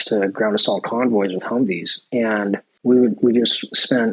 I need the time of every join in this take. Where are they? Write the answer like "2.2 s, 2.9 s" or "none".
2.7 s